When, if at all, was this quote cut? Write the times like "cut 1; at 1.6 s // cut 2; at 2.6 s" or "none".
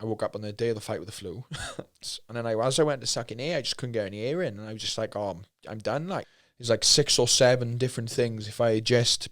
cut 1; at 2.0 s // cut 2; at 6.3 s